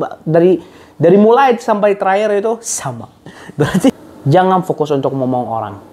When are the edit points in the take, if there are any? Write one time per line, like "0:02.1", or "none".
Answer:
0:03.9

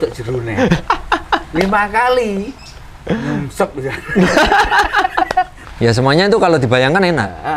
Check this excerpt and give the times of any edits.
0:05.6

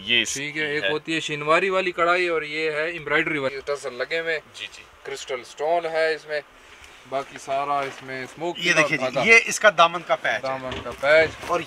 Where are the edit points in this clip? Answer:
0:03.5

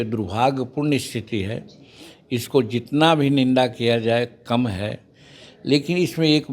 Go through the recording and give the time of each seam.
none

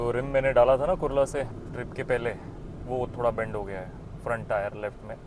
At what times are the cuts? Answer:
0:01.6

